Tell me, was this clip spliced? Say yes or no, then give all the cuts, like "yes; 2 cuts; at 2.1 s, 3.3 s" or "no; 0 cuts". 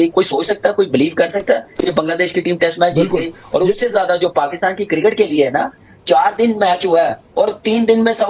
no; 0 cuts